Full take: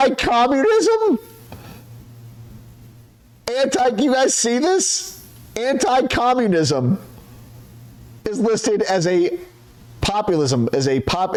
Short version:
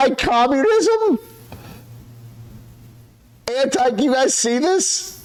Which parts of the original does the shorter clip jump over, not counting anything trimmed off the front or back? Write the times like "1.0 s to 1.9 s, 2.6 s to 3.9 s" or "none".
none